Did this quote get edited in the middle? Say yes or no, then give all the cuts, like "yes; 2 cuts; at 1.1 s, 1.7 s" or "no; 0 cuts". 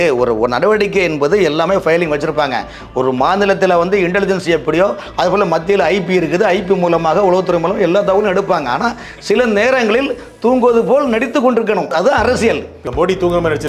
yes; 2 cuts; at 11.9 s, 12.8 s